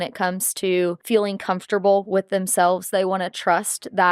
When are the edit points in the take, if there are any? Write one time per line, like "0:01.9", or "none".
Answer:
0:01.0